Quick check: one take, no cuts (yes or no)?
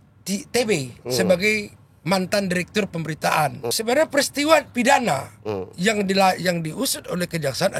no